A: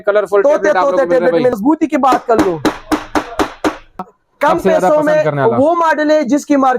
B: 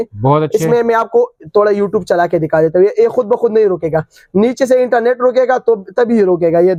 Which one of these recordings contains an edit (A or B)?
A